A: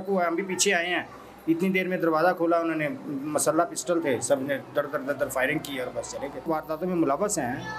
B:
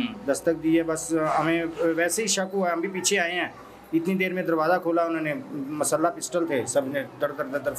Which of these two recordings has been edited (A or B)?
A